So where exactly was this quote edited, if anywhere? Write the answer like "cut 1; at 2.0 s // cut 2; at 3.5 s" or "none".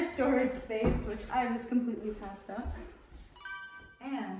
none

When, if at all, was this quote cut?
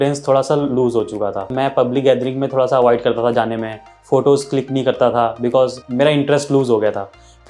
cut 1; at 1.5 s // cut 2; at 5.8 s

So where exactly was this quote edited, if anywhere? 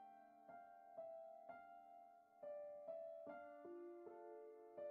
none

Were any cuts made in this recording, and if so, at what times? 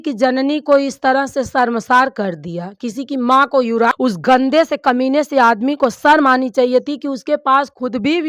cut 1; at 3.9 s

